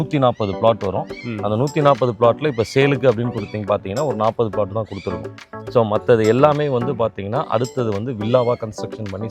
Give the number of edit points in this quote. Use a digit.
0